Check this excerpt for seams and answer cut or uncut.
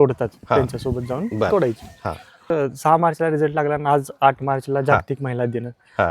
cut